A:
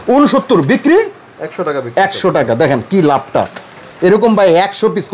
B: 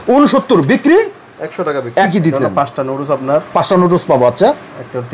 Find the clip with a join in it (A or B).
B